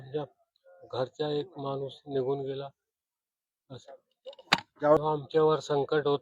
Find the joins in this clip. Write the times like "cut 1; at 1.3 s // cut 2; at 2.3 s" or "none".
cut 1; at 5.0 s